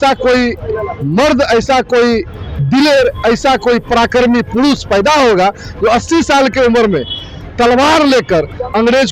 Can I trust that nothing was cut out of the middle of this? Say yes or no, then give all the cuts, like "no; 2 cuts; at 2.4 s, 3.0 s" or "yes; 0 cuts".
yes; 0 cuts